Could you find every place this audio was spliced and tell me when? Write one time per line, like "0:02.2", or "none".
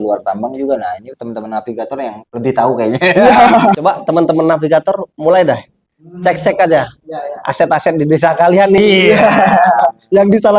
0:03.8